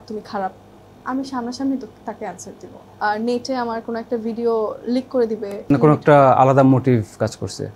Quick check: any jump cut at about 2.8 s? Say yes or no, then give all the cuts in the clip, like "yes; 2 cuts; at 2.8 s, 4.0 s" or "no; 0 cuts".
yes; 2 cuts; at 2.8 s, 5.7 s